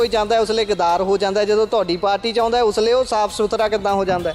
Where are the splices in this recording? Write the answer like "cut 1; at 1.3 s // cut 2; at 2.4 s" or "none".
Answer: none